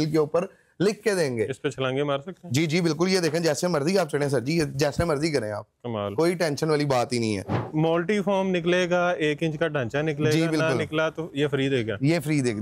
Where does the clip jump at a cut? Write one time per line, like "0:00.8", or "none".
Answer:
0:07.6